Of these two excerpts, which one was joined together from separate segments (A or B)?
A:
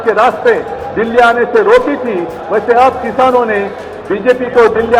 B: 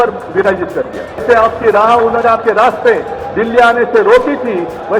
B